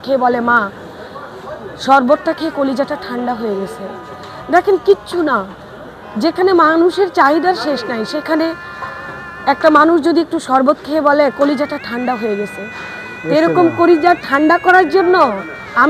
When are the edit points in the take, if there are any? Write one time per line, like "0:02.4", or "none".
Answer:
none